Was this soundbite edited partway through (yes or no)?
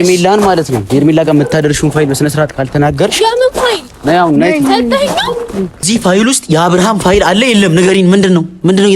yes